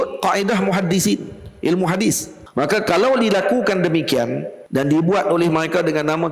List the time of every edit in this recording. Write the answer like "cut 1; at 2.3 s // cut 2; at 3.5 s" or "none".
cut 1; at 2.3 s // cut 2; at 4.5 s